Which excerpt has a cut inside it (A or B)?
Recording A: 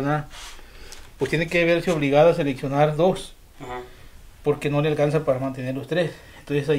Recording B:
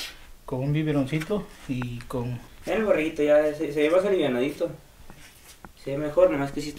B